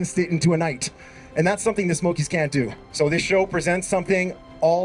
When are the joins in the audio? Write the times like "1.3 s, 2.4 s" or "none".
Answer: 2.8 s